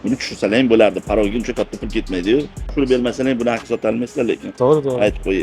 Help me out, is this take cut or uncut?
cut